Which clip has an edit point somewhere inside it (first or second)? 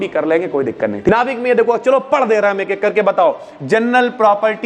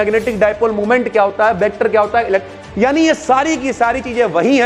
first